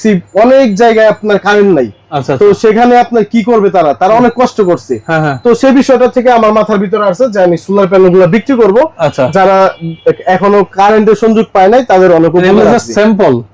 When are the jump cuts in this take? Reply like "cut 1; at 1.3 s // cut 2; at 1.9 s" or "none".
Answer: none